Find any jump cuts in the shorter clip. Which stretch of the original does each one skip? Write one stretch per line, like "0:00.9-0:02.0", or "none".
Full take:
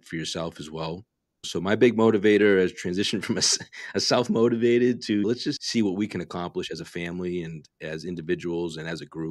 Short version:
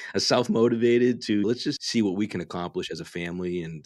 none